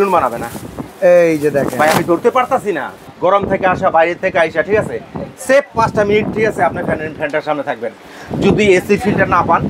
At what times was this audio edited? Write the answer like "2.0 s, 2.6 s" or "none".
3.0 s